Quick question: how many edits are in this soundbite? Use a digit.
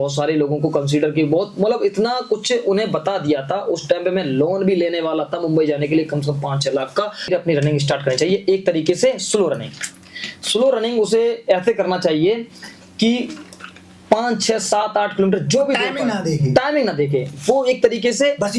1